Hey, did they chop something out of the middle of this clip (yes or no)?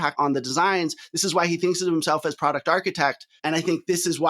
yes